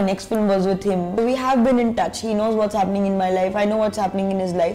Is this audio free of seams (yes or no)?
no